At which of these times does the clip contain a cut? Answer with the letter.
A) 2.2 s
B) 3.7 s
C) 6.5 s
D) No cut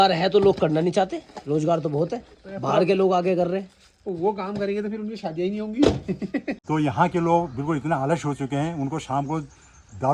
C